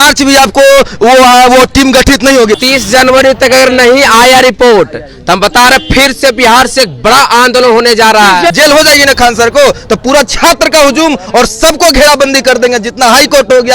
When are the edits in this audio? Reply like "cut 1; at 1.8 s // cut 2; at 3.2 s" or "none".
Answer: cut 1; at 2.6 s // cut 2; at 8.5 s